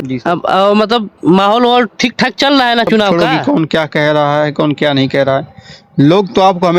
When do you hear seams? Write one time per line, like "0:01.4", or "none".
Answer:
0:03.1